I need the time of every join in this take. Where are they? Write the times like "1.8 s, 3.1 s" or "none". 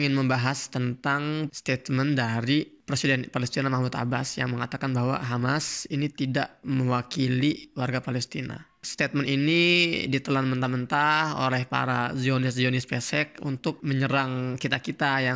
1.5 s, 2.8 s, 6.6 s, 8.8 s, 13.8 s

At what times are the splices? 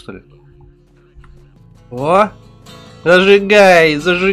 1.5 s

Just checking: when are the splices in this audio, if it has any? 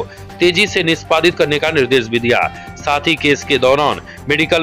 none

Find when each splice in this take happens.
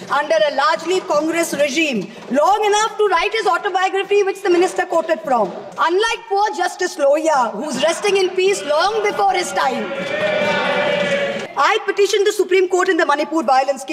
5.6 s, 11.4 s

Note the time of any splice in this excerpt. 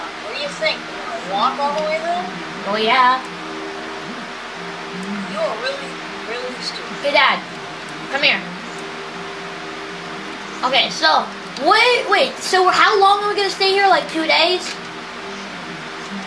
2.9 s

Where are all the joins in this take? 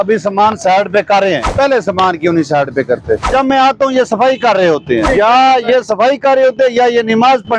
1.5 s, 3.3 s, 5.0 s

